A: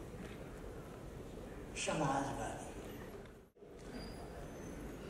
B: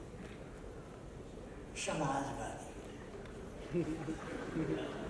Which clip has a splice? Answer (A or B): A